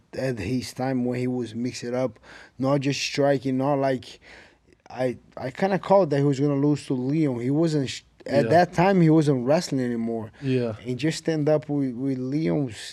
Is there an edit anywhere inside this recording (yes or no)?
no